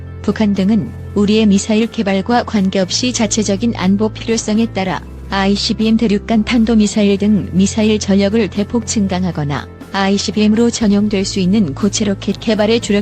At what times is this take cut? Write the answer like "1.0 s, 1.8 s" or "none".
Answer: none